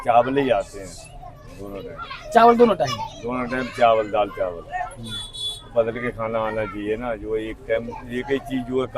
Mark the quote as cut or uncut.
uncut